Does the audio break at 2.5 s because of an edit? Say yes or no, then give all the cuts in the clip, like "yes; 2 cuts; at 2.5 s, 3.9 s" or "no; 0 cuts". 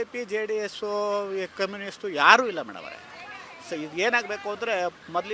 no; 0 cuts